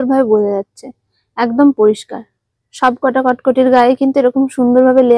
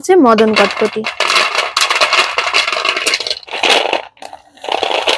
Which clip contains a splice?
second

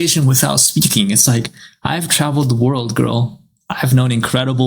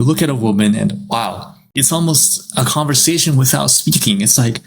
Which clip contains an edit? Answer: second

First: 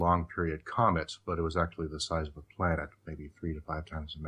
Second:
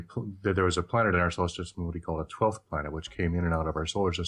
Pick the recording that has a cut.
second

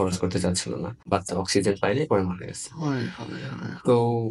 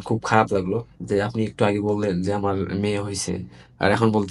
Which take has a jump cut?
first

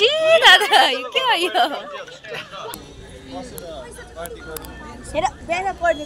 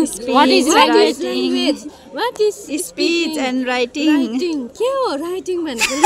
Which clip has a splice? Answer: first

